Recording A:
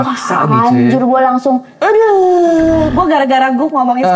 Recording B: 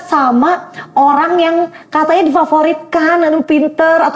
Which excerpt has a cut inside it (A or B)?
A